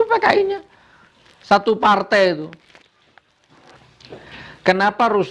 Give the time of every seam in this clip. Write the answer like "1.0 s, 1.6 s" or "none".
3.7 s